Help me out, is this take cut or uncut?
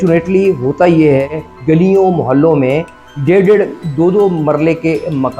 cut